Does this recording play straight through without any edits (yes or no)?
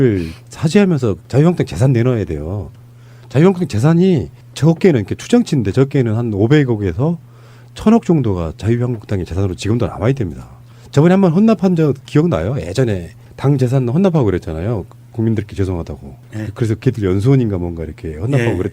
yes